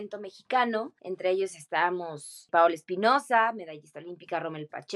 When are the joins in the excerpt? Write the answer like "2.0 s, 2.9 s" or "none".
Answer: 1.0 s, 2.3 s